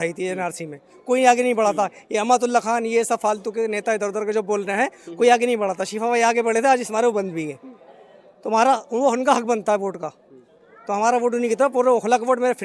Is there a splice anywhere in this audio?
no; 0 cuts

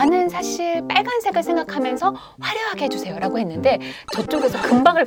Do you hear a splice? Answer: no; 0 cuts

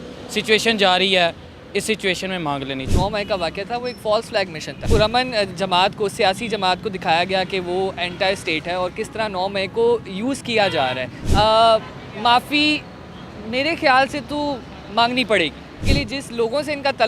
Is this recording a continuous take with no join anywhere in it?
no; 4 cuts; at 2.9 s, 4.8 s, 11.2 s, 15.9 s

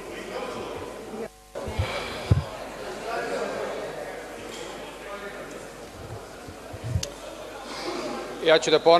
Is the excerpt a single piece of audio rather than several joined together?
yes; 0 cuts

